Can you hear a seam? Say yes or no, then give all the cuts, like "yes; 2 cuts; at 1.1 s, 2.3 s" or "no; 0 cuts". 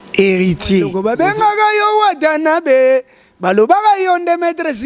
yes; 1 cut; at 0.9 s